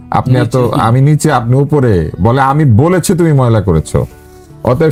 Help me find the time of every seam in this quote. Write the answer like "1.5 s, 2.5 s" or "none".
none